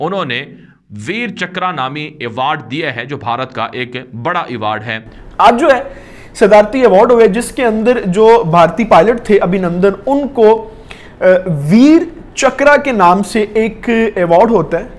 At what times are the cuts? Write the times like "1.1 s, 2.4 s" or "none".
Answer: 5.1 s